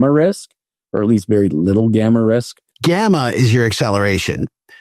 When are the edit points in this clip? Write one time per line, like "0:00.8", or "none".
0:02.6

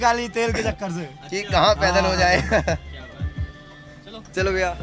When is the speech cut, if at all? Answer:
none

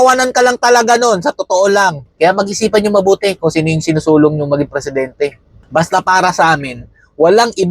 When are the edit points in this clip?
0:02.0

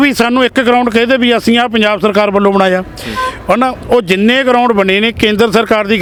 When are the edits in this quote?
none

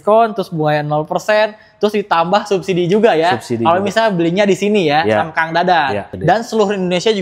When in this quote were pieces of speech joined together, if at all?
0:06.1

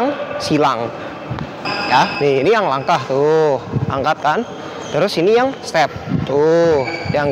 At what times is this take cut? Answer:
0:02.1

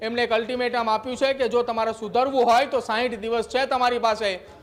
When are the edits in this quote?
none

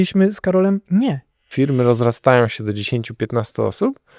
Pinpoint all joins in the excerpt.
0:01.4

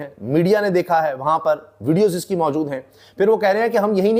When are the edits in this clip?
none

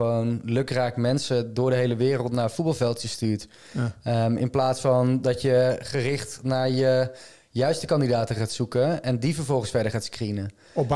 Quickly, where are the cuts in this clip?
none

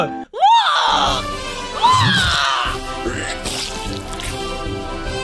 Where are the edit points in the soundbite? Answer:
none

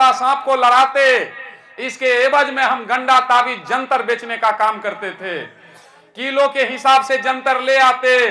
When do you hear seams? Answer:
none

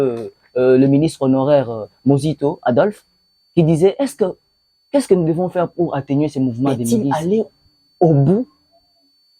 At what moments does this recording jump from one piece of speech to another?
0:06.9

